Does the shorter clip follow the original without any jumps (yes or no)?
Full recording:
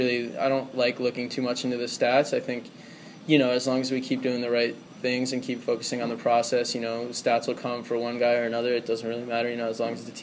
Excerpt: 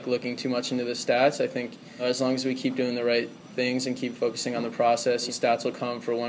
no